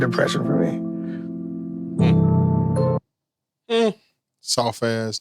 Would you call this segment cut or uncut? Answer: uncut